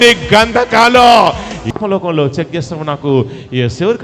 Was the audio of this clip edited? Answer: yes; 1 cut; at 1.6 s

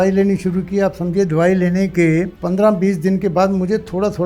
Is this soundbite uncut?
no; 1 cut; at 2.4 s

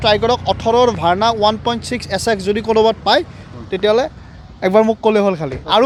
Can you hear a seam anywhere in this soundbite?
no; 0 cuts

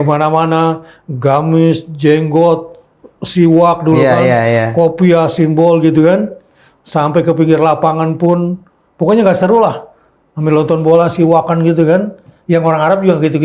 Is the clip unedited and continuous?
yes; 0 cuts

